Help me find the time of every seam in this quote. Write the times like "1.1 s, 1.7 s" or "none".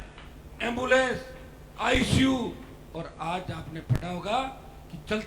none